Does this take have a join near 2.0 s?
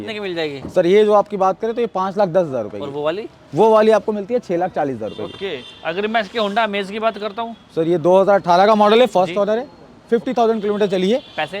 no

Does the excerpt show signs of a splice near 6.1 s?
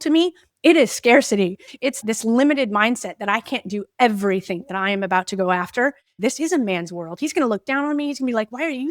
yes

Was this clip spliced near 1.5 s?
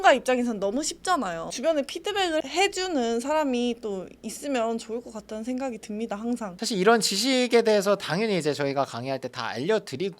yes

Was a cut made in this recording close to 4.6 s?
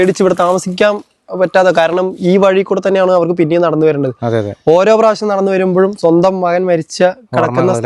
no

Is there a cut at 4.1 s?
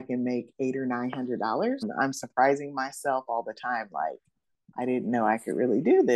no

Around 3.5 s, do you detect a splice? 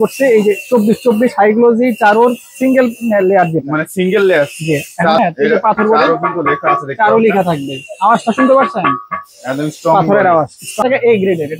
no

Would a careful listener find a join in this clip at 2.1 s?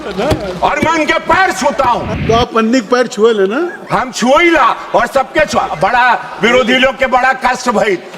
yes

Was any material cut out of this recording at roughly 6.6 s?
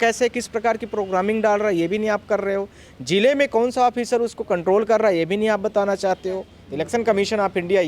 yes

